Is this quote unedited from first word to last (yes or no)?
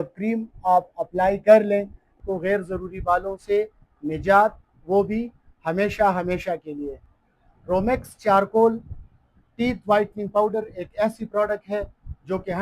no